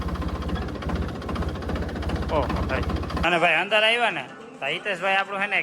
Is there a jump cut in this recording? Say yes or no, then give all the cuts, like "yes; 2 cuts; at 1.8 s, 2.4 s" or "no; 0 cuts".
yes; 1 cut; at 3.2 s